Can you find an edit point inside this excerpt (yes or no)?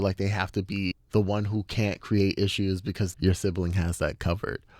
yes